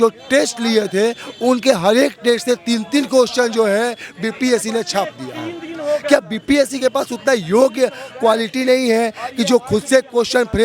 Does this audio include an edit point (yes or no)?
no